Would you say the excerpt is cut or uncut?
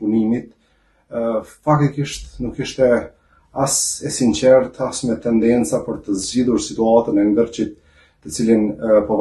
uncut